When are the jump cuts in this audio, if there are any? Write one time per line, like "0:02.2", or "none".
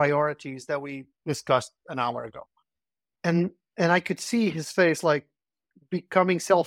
0:01.1